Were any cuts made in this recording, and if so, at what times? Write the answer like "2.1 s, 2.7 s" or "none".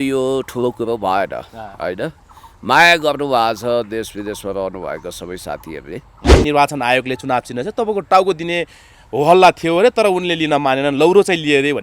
6.4 s